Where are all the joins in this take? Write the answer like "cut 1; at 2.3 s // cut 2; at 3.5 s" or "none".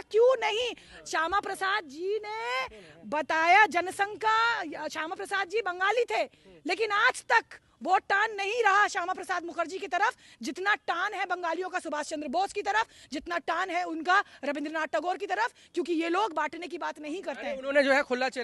none